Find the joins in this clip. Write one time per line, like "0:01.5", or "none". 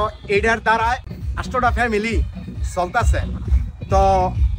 0:01.2